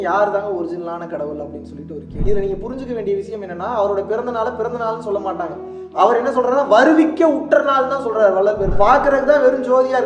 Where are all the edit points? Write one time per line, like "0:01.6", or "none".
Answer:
0:02.2
0:08.7